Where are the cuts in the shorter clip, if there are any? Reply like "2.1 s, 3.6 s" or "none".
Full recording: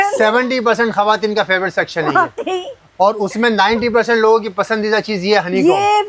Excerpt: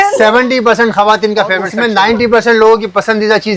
1.7 s